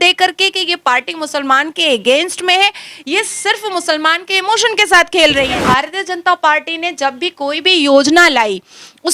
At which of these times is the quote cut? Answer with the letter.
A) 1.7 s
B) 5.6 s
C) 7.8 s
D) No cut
B